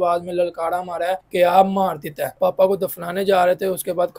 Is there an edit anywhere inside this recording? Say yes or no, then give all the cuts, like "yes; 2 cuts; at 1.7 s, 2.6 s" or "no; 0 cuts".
yes; 2 cuts; at 1.2 s, 2.4 s